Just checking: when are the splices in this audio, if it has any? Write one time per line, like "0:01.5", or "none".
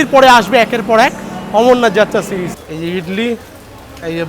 0:02.5